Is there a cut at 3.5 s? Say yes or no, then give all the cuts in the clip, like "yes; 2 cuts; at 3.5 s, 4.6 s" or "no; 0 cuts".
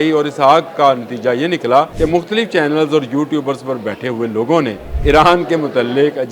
no; 2 cuts; at 1.9 s, 4.9 s